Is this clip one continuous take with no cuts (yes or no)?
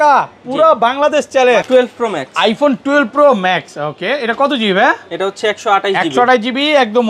no